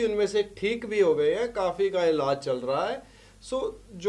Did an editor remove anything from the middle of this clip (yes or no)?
no